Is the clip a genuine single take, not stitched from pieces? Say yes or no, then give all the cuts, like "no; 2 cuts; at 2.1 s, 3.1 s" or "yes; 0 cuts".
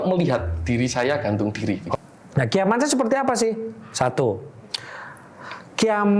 no; 1 cut; at 1.9 s